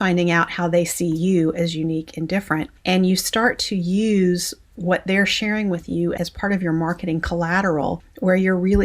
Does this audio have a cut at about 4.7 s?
no; 1 cut; at 2.7 s

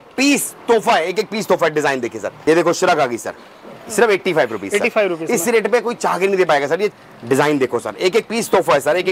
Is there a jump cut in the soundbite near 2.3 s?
yes; 2 cuts; at 2.3 s, 6.9 s

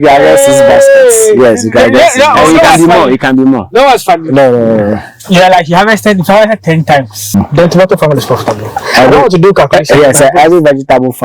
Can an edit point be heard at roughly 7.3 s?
yes; 1 cut; at 7.3 s

